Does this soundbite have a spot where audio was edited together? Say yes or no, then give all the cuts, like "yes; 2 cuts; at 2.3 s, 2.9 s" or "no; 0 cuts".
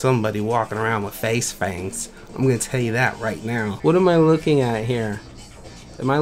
yes; 1 cut; at 3.8 s